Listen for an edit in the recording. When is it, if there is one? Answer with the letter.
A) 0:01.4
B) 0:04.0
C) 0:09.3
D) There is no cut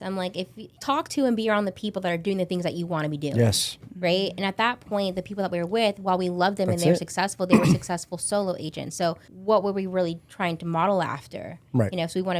C